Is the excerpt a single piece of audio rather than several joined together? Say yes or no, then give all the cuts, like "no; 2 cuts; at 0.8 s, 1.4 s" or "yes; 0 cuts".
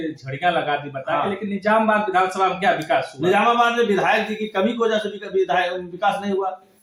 yes; 0 cuts